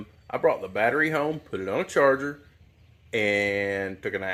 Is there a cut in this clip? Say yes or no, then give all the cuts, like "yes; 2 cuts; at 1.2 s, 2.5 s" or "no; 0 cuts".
no; 0 cuts